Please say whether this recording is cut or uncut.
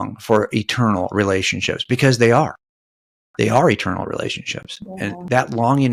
uncut